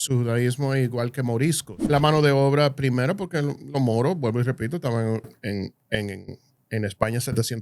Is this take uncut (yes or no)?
no